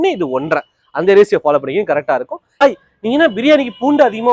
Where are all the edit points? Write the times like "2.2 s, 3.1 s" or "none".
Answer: 2.6 s